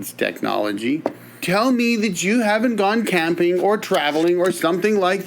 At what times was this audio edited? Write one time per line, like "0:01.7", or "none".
0:01.4